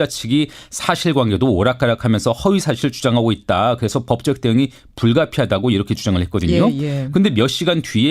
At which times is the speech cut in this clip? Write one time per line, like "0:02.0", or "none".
0:02.0